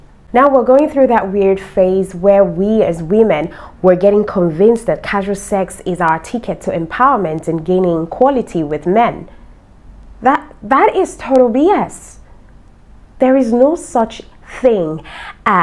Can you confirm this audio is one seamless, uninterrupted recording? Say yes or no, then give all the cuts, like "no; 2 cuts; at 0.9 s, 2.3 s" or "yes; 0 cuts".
yes; 0 cuts